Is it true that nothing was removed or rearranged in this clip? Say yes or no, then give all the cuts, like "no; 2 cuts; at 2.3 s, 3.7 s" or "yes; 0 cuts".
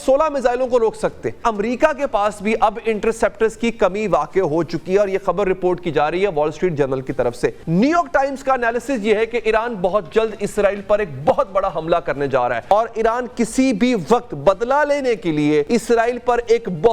no; 4 cuts; at 1.4 s, 7.6 s, 12.6 s, 15.7 s